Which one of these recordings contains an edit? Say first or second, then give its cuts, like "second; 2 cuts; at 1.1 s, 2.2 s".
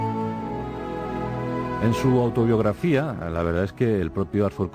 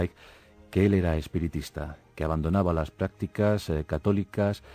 second; 1 cut; at 3.6 s